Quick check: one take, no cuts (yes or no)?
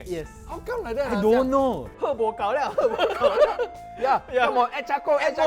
no